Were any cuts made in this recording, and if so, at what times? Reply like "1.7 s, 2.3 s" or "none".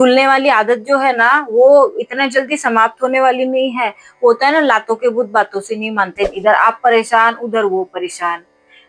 6.3 s